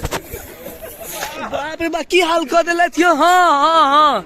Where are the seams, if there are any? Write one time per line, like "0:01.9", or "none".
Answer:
0:01.4